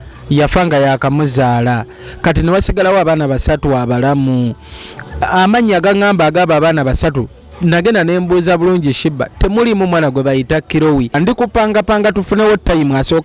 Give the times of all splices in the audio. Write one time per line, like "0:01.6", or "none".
0:11.2